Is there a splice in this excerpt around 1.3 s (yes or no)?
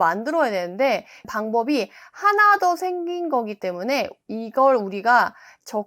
yes